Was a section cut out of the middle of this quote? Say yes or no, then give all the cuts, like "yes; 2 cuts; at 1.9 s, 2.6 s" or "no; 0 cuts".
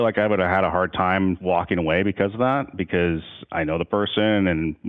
yes; 1 cut; at 1.4 s